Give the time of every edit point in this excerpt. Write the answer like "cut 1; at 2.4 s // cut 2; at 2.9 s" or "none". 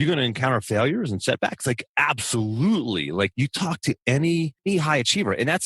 cut 1; at 1.9 s // cut 2; at 3.3 s // cut 3; at 4.6 s